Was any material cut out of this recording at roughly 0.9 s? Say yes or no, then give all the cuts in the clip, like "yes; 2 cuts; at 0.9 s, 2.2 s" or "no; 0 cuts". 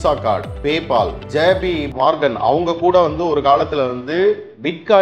yes; 1 cut; at 0.9 s